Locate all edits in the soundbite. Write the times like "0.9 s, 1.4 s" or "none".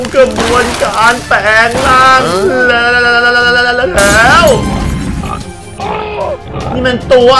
none